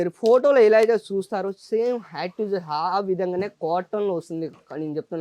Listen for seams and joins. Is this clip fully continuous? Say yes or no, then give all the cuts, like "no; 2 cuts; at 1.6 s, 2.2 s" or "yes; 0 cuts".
yes; 0 cuts